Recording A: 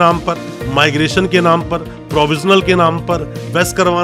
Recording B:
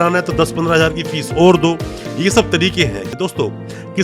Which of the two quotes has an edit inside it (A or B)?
B